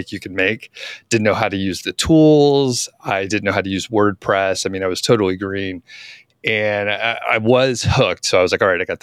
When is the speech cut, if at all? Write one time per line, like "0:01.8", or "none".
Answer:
none